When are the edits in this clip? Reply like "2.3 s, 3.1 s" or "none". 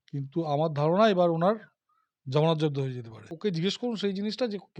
3.4 s